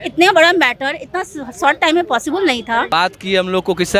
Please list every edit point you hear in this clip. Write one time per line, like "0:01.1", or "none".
0:02.9